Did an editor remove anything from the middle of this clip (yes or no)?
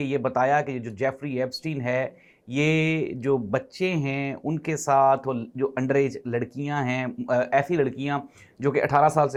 no